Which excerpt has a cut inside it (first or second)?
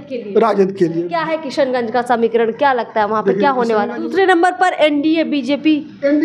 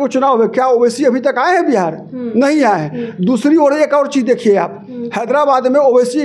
first